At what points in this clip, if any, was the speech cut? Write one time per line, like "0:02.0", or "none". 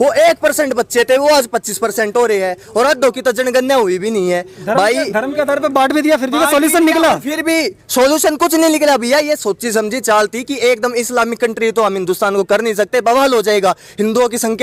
none